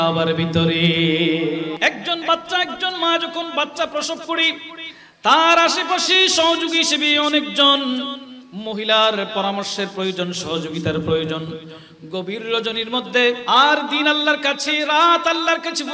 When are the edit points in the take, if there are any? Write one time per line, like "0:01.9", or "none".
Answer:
0:01.8
0:13.4